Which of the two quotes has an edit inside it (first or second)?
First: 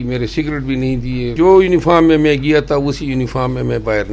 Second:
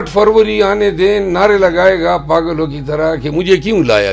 first